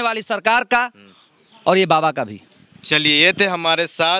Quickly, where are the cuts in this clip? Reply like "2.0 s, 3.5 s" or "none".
none